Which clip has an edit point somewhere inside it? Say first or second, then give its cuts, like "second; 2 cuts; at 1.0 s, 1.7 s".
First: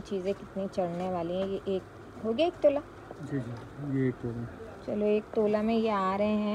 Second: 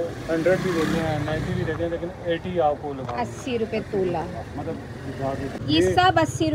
second; 1 cut; at 5.6 s